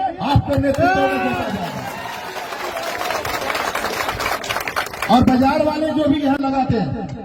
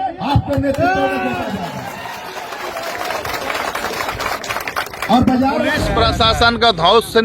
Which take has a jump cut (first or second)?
second